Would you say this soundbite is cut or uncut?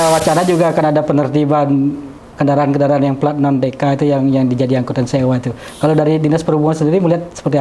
uncut